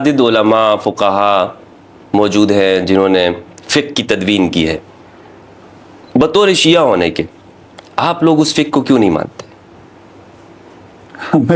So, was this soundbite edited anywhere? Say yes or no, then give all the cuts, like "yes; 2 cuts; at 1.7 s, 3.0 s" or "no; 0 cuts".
no; 0 cuts